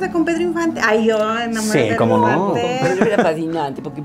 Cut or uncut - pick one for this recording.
uncut